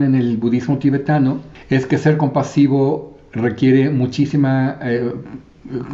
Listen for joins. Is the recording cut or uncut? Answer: cut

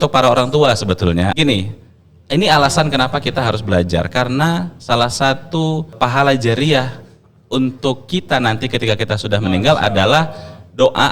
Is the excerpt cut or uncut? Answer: cut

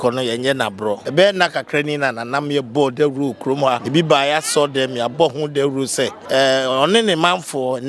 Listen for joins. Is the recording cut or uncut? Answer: cut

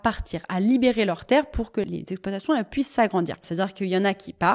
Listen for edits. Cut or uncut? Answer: cut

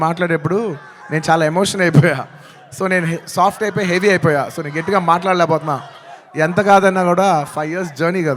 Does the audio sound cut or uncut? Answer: uncut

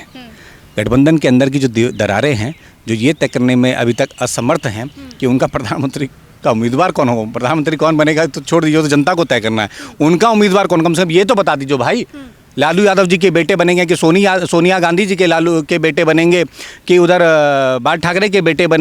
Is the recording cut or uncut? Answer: uncut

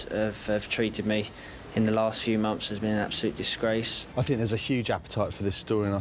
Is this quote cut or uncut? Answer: cut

